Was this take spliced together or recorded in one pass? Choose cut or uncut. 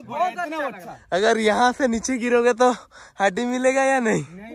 uncut